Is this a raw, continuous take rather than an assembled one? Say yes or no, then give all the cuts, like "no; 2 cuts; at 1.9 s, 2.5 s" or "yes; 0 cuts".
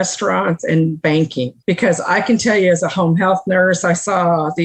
no; 1 cut; at 1.5 s